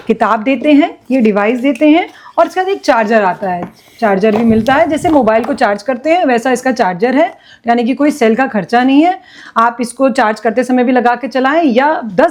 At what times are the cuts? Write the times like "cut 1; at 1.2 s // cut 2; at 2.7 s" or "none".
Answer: none

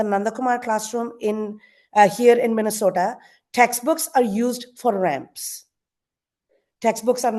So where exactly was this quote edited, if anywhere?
none

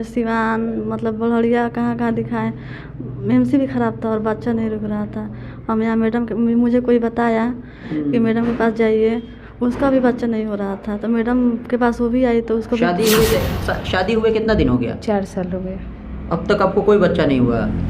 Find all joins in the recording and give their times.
cut 1; at 13.4 s

